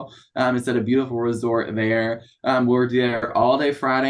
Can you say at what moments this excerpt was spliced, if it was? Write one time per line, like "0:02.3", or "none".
none